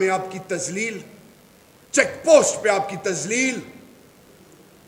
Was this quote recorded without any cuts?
yes; 0 cuts

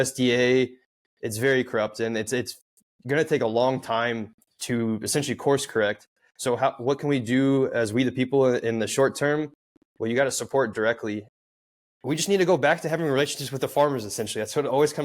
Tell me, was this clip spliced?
yes; 1 cut; at 11.3 s

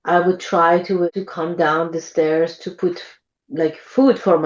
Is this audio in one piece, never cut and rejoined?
no; 1 cut; at 1.1 s

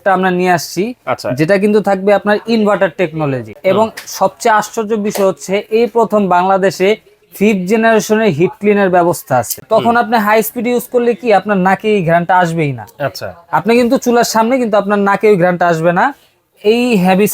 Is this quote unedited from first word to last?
no; 2 cuts; at 3.5 s, 9.6 s

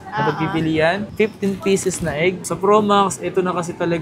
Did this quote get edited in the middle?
yes; 1 cut; at 2.4 s

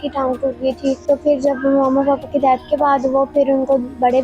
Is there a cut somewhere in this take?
yes; 1 cut; at 1.0 s

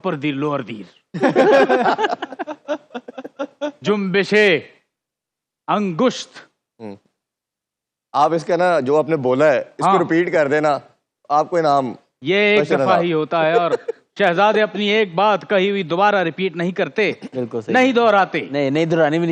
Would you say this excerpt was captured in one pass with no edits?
yes; 0 cuts

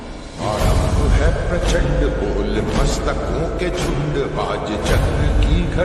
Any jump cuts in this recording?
no; 0 cuts

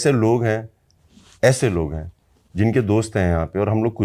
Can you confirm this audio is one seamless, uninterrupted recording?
yes; 0 cuts

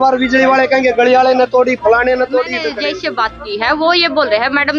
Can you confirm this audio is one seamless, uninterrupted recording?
no; 1 cut; at 2.6 s

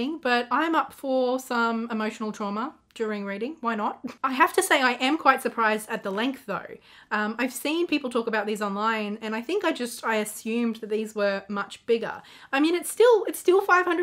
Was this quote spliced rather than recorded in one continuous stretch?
no; 0 cuts

